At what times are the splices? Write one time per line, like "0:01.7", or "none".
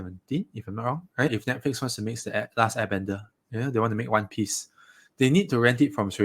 0:01.4